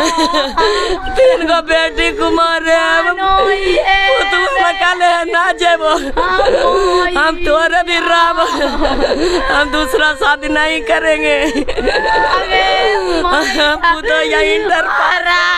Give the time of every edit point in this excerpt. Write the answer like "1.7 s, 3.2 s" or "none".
none